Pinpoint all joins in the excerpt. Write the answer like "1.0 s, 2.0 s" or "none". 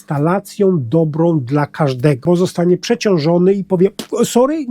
2.2 s